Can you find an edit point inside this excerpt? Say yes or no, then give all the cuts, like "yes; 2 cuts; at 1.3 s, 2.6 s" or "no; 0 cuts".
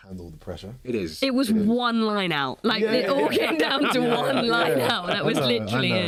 no; 0 cuts